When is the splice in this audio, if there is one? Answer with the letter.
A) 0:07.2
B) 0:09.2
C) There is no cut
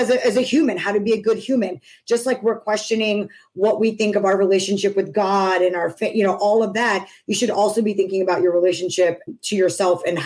B